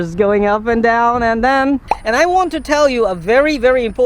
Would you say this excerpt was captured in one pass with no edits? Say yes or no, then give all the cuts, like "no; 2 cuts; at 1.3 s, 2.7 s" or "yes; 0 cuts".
no; 1 cut; at 1.9 s